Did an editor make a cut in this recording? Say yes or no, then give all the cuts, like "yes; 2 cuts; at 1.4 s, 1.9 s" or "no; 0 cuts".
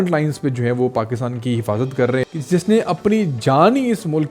yes; 1 cut; at 2.4 s